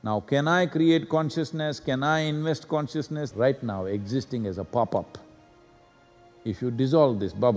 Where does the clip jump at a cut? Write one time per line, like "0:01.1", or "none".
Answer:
0:03.3

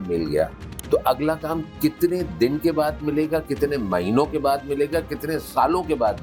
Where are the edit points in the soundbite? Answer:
none

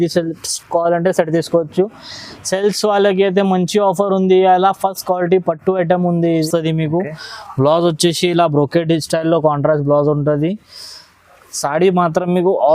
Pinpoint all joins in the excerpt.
0:06.5

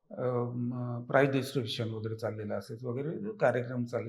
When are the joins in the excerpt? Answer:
none

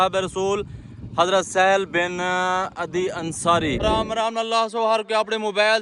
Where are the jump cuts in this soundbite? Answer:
0:04.2

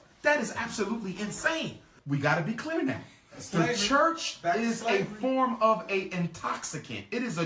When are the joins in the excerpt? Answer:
0:01.9

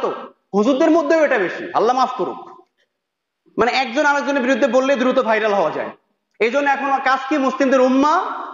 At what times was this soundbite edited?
none

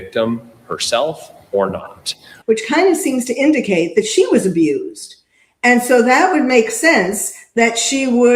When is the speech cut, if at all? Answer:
0:02.3

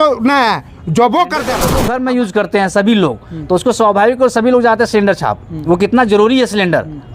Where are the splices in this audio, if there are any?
0:01.8

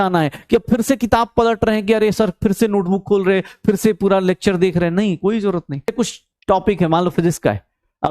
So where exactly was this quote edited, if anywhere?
0:05.9

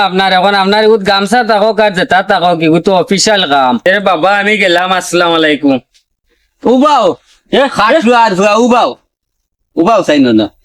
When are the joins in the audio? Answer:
0:03.8

